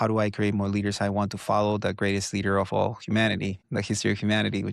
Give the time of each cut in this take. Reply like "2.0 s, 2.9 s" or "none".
none